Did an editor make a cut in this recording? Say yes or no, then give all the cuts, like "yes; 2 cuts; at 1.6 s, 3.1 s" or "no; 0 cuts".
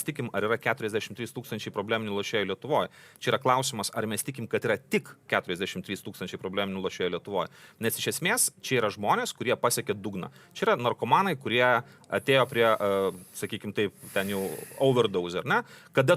no; 0 cuts